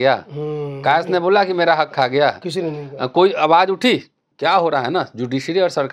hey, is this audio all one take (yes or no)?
no